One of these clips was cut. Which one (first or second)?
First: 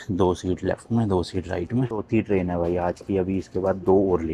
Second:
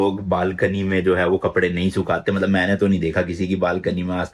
first